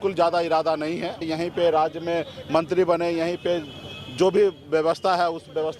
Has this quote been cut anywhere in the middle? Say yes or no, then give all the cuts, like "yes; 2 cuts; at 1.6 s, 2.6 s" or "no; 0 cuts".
yes; 1 cut; at 1.3 s